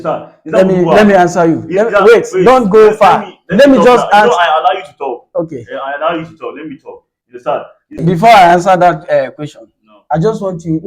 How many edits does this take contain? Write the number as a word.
one